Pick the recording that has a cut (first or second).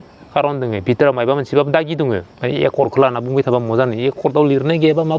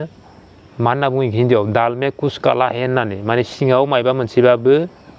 first